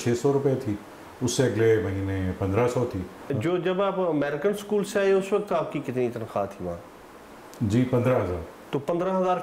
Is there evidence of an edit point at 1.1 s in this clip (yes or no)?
no